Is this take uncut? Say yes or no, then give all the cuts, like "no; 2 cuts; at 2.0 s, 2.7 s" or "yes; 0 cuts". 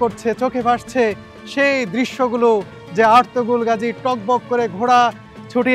yes; 0 cuts